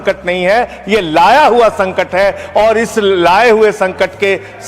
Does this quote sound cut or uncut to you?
uncut